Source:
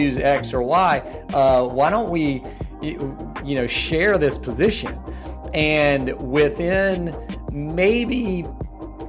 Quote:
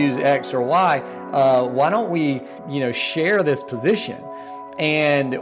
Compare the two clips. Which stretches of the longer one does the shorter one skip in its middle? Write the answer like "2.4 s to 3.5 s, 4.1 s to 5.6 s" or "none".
2.6 s to 3.3 s